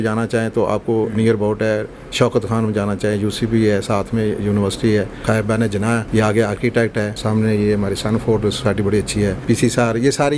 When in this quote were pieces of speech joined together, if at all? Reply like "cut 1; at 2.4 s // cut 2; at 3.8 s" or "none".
cut 1; at 5.6 s // cut 2; at 7.2 s // cut 3; at 9.4 s